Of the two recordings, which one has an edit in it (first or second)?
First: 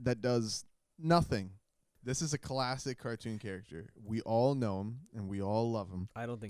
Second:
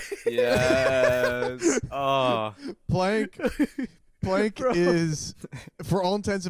first